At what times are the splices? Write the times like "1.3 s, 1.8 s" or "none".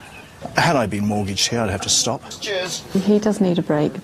2.4 s